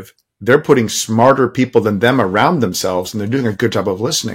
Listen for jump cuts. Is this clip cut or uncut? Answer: uncut